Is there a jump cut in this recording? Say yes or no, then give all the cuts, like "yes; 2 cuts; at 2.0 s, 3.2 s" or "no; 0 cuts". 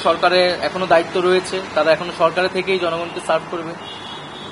no; 0 cuts